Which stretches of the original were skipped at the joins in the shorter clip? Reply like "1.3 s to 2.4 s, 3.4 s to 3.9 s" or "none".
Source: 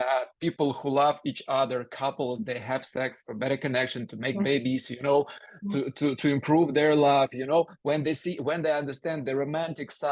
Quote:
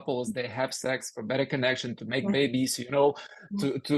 none